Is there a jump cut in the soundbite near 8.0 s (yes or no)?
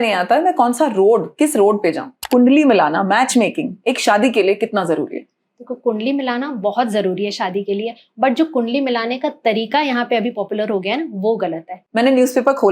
no